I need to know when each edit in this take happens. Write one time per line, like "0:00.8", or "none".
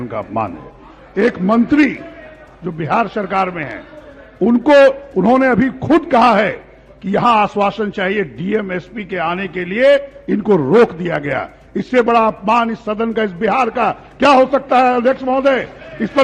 none